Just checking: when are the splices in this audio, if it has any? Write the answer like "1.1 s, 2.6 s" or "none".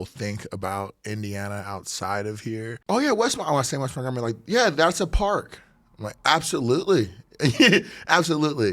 2.8 s

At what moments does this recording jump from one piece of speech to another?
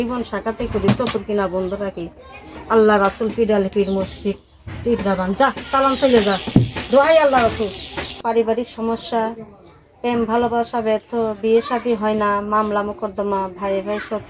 8.1 s

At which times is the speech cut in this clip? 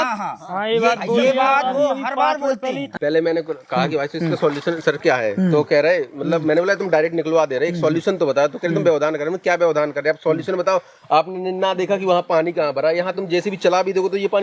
2.9 s

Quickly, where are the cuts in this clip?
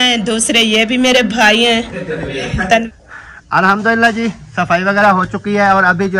2.9 s

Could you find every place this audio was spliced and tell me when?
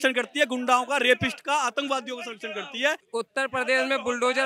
3.0 s

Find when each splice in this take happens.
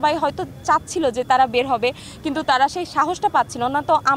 none

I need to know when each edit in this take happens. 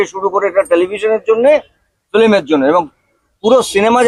none

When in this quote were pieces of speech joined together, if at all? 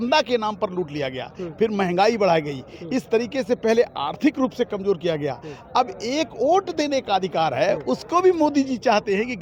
none

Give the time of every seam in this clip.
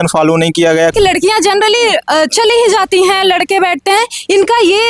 0.9 s

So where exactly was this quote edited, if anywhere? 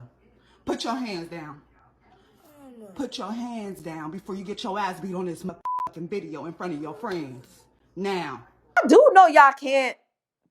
8.7 s

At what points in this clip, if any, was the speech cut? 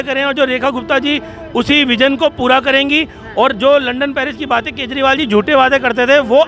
none

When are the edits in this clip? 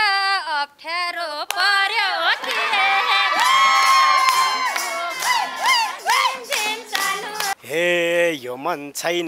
7.5 s

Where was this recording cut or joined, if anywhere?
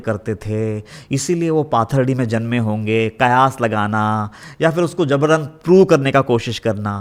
none

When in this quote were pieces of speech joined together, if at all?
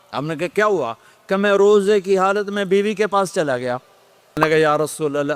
4.4 s

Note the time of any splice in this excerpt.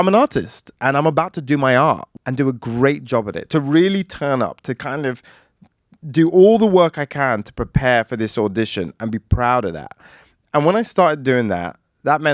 2.1 s

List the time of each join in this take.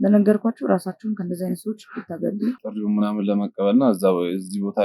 2.6 s

